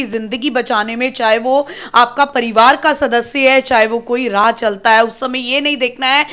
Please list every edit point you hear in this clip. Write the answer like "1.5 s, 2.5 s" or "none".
none